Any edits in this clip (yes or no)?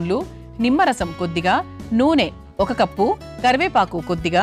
no